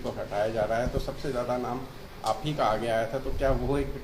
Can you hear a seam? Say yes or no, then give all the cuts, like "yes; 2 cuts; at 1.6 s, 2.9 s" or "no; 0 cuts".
no; 0 cuts